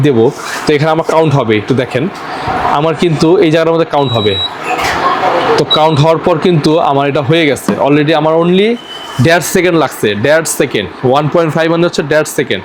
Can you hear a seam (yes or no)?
no